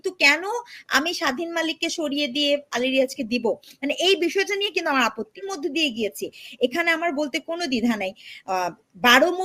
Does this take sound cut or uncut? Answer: cut